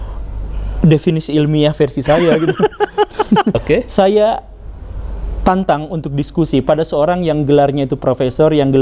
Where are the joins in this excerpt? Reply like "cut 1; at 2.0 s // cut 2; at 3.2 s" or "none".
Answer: cut 1; at 3.5 s

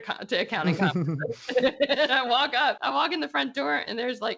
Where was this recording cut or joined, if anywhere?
none

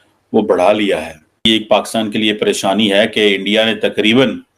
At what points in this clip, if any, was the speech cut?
cut 1; at 1.4 s

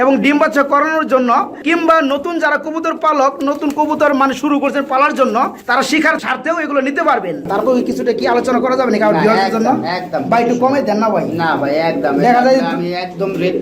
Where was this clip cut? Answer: cut 1; at 7.5 s

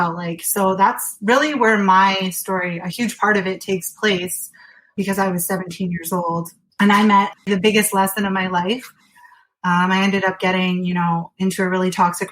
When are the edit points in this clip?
cut 1; at 4.9 s // cut 2; at 6.6 s // cut 3; at 7.3 s

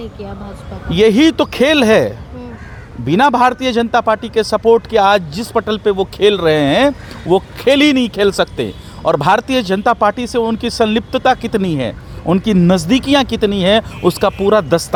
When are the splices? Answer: none

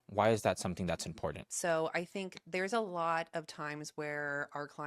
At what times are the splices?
cut 1; at 1.5 s

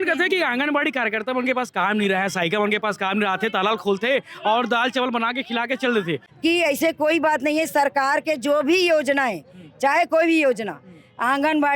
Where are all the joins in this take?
cut 1; at 6.2 s

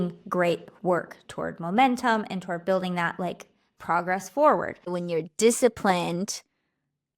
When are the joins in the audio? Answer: cut 1; at 4.9 s

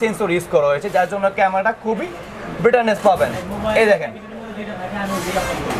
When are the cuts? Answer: none

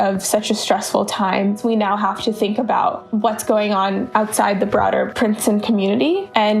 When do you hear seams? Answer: cut 1; at 1.6 s

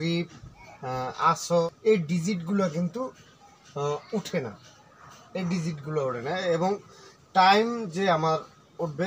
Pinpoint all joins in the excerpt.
cut 1; at 1.6 s

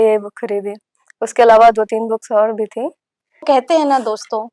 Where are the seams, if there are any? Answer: cut 1; at 3.4 s

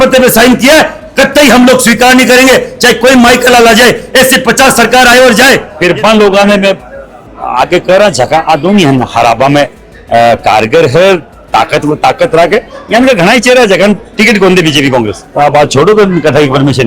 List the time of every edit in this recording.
cut 1; at 5.7 s // cut 2; at 15.2 s

